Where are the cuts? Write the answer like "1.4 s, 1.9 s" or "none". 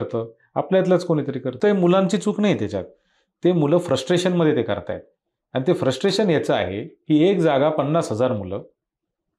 1.5 s